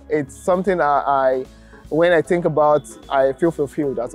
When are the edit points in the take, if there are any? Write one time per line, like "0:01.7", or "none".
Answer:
none